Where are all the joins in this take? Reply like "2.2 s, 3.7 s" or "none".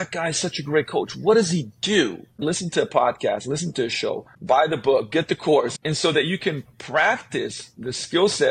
2.3 s, 4.3 s